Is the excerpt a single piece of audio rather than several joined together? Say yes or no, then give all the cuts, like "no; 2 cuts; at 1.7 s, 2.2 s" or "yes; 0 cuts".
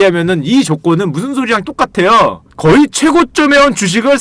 yes; 0 cuts